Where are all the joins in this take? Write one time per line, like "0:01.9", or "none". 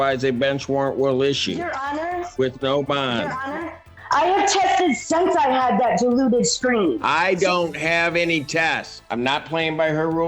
0:03.9
0:09.0